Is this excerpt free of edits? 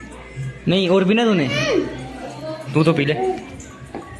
yes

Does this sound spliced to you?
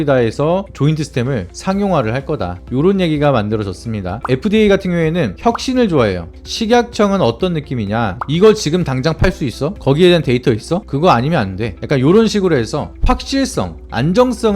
yes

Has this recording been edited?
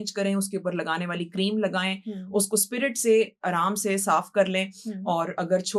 no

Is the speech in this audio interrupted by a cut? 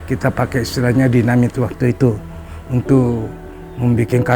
yes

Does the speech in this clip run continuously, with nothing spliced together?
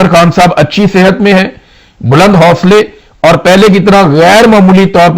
yes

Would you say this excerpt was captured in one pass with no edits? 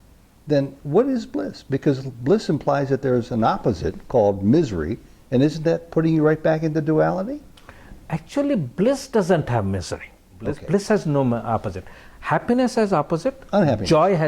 no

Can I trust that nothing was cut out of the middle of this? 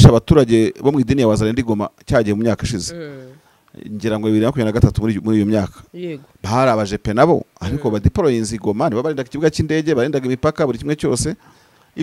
yes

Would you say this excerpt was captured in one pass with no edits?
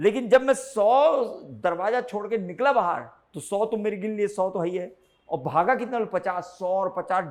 yes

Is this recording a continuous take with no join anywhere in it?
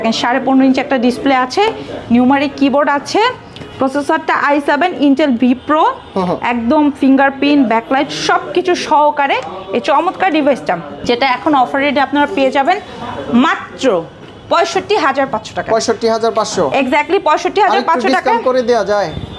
yes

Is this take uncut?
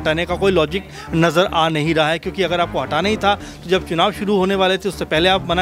yes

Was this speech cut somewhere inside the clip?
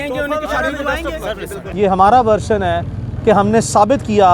yes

